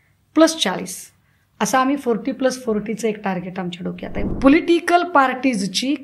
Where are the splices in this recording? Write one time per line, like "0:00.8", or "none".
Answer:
0:04.1